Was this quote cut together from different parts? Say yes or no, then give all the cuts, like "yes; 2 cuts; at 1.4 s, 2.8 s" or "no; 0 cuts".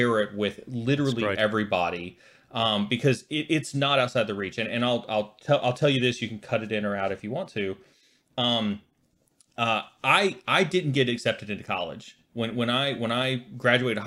no; 0 cuts